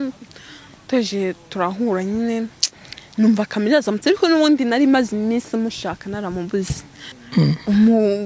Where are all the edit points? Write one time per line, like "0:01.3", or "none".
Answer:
0:07.2